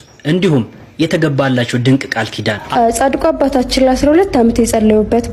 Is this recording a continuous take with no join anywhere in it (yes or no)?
no